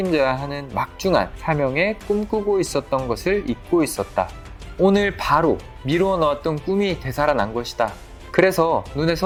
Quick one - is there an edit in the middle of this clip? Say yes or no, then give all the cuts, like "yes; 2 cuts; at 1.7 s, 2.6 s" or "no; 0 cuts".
no; 0 cuts